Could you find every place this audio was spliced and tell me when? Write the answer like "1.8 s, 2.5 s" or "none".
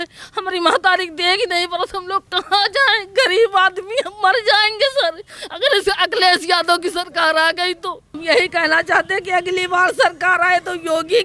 8.1 s